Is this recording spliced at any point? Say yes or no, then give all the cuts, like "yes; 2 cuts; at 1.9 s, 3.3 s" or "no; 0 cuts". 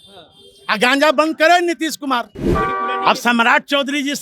yes; 1 cut; at 2.4 s